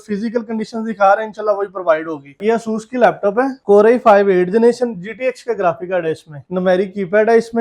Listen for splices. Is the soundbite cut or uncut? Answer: cut